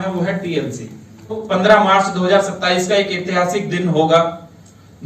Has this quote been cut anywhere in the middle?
yes; 1 cut; at 1.4 s

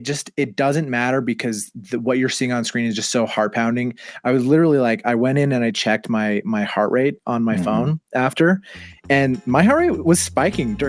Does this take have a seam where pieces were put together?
no; 0 cuts

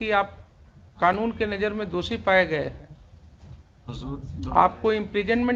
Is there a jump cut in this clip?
no; 0 cuts

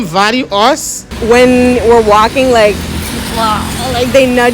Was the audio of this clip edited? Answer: yes; 1 cut; at 1.2 s

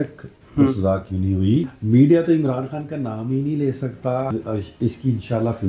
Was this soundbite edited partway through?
yes; 2 cuts; at 1.8 s, 4.3 s

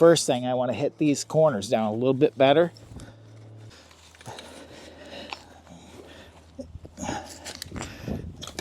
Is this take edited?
yes; 1 cut; at 3.7 s

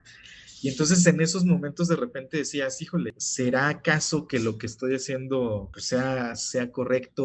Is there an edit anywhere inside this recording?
yes; 2 cuts; at 3.2 s, 5.7 s

